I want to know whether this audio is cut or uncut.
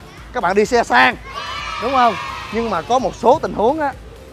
uncut